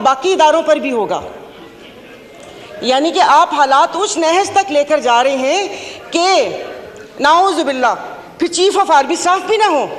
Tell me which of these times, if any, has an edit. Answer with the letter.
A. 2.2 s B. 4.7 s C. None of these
C